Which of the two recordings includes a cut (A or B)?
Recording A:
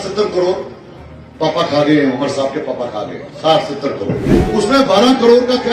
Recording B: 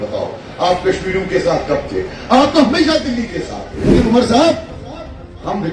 B